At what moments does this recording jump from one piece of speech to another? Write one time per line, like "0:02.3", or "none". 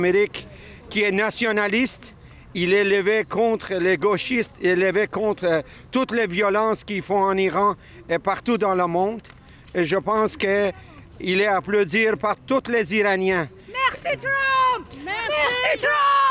none